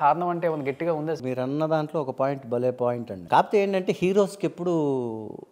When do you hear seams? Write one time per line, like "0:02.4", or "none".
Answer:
0:01.2
0:03.1